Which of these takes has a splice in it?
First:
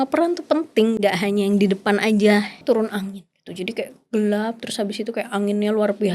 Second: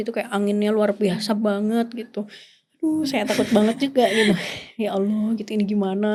first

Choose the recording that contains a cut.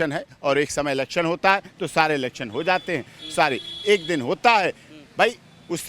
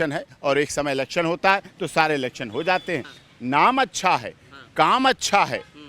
second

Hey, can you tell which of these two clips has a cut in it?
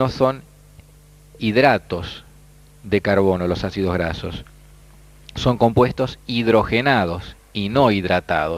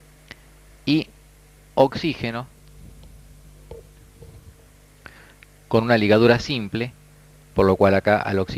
second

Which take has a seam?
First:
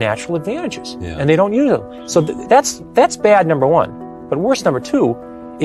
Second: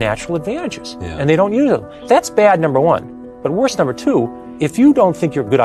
second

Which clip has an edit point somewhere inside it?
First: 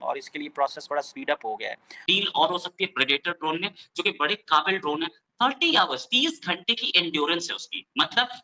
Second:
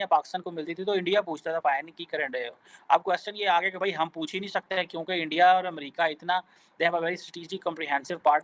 first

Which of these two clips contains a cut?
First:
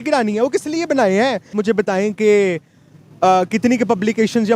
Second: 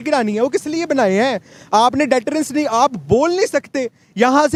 first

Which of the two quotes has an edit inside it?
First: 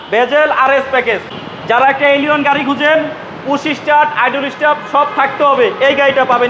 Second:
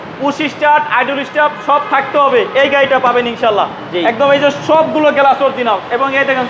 first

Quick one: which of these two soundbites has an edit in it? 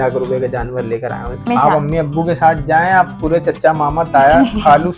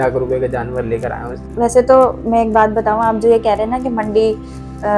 first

